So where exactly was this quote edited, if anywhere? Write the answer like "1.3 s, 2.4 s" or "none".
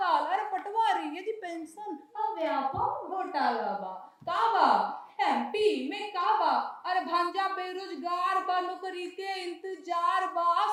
none